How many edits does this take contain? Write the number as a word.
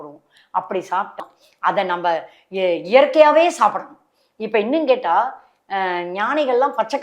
one